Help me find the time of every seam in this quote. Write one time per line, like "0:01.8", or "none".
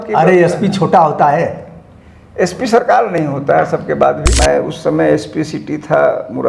0:04.3